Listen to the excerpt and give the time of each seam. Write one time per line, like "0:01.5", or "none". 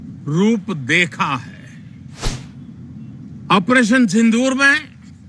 0:02.4